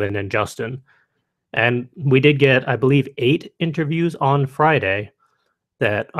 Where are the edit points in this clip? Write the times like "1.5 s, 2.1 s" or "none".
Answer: none